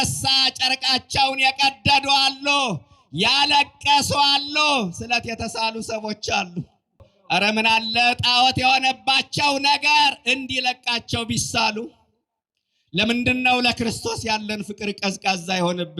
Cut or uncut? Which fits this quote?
cut